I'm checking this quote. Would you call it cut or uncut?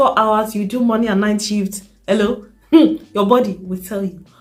uncut